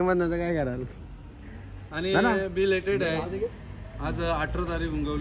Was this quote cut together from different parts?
no; 0 cuts

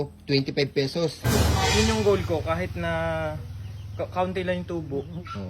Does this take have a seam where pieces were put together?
yes; 1 cut; at 1.3 s

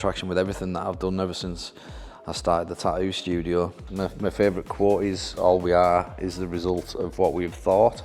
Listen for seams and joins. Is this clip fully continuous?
no; 1 cut; at 3.8 s

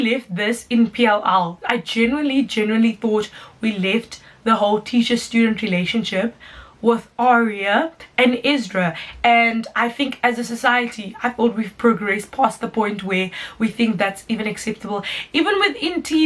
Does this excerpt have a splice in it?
no; 0 cuts

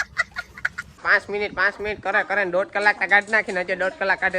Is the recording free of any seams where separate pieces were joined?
no; 1 cut; at 1.0 s

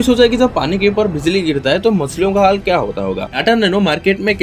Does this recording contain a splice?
yes; 1 cut; at 3.3 s

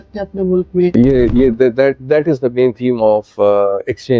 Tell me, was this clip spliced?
yes; 1 cut; at 0.9 s

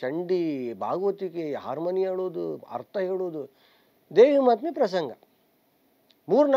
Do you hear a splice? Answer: no; 0 cuts

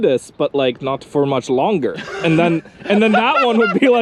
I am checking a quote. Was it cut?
no; 0 cuts

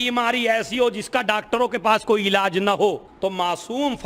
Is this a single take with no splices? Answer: no; 1 cut; at 3.1 s

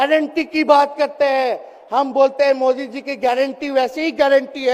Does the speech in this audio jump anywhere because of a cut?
no; 0 cuts

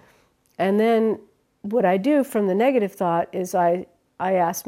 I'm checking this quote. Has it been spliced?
no; 0 cuts

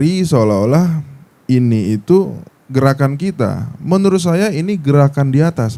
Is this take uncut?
yes; 0 cuts

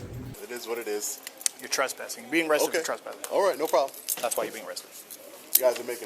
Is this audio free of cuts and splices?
yes; 0 cuts

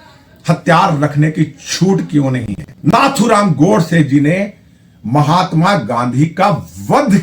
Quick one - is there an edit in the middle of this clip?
yes; 1 cut; at 2.9 s

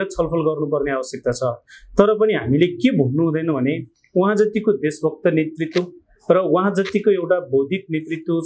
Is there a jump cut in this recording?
no; 0 cuts

